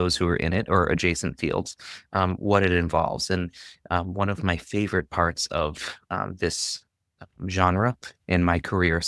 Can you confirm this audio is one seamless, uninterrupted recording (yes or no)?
yes